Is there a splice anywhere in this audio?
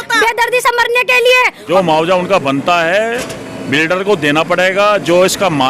yes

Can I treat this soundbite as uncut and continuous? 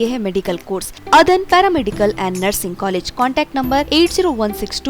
no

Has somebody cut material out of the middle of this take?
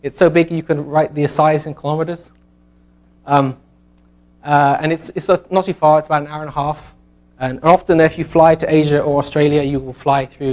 no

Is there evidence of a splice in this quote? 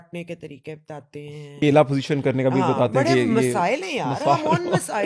yes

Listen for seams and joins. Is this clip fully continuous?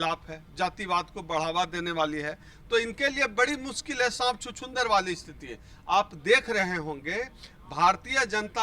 yes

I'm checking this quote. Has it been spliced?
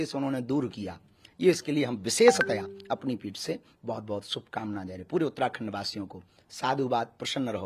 no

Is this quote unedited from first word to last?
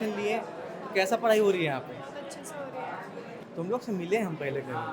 yes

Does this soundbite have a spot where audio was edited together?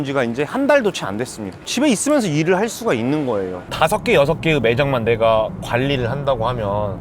yes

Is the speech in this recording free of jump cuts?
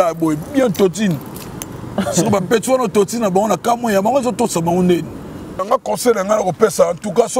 no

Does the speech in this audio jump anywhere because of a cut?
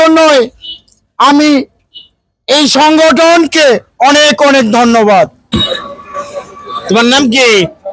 yes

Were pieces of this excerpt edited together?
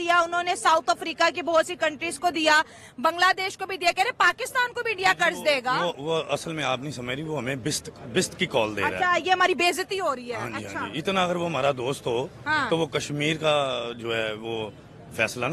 no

